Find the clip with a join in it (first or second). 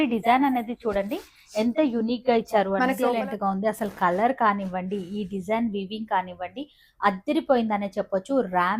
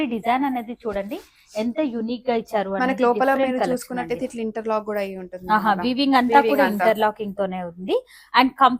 first